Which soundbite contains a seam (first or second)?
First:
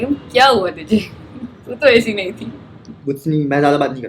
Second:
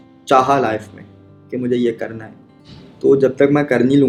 first